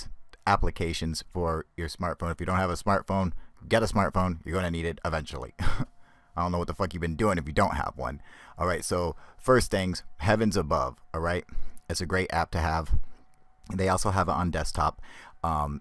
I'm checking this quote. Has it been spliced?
yes; 1 cut; at 5.3 s

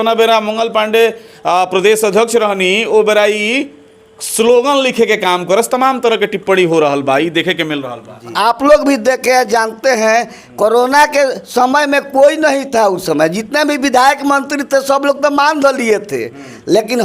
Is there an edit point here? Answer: yes; 1 cut; at 8.3 s

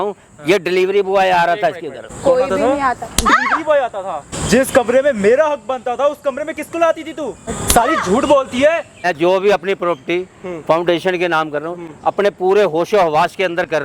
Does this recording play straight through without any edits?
no; 4 cuts; at 2.1 s, 4.4 s, 7.5 s, 9.1 s

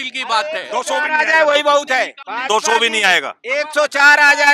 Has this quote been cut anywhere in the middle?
yes; 1 cut; at 2.3 s

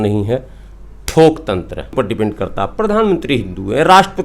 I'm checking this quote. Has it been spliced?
yes; 1 cut; at 1.9 s

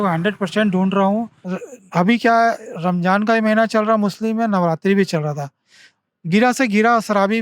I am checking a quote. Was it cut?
yes; 1 cut; at 1.4 s

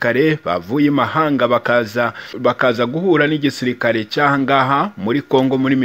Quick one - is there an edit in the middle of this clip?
yes; 1 cut; at 2.2 s

